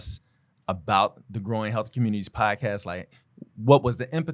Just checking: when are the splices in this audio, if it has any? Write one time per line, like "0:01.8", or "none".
none

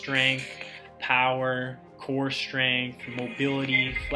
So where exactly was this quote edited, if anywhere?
none

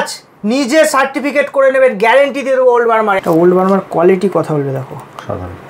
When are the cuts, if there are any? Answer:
0:03.2

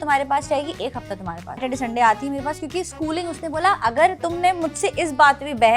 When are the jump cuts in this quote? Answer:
0:01.6

